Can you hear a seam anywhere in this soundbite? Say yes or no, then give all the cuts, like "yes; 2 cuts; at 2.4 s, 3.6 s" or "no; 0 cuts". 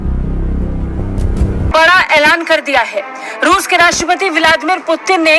yes; 1 cut; at 1.7 s